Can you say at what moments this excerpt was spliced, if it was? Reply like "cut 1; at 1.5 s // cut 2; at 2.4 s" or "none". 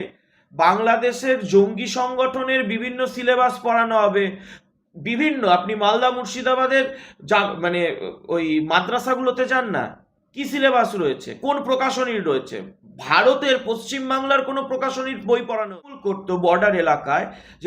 cut 1; at 15.9 s